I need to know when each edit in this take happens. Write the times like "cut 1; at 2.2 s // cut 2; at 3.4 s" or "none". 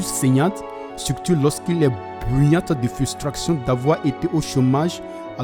none